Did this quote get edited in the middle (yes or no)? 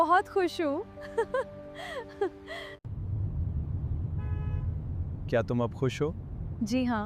yes